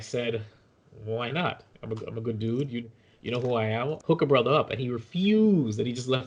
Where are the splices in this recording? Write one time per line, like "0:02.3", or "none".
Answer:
0:04.0

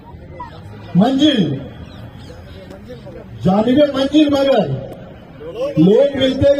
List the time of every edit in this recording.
none

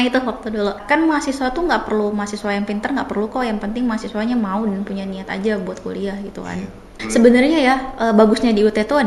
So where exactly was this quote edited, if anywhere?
0:00.8
0:06.9

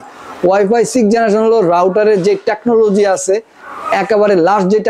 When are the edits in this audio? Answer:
none

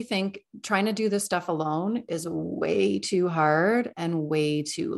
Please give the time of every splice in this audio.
none

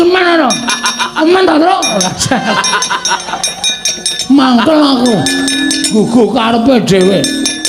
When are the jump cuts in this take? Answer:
none

